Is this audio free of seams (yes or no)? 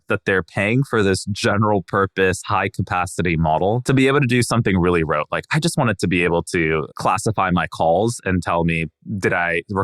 no